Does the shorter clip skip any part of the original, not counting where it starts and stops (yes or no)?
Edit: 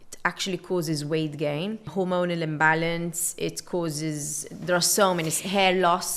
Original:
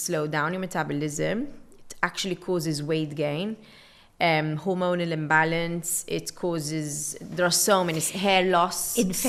yes